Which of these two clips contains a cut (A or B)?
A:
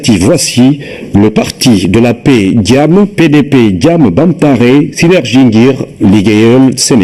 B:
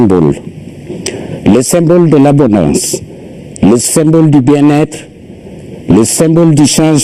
B